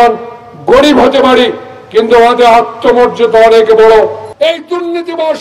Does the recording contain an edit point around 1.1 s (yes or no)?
no